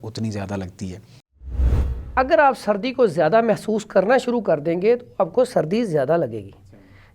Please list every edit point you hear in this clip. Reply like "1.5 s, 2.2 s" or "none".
1.5 s